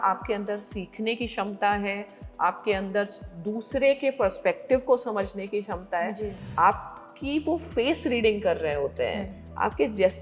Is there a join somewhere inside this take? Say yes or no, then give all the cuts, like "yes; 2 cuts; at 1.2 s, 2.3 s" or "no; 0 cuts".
yes; 1 cut; at 6.4 s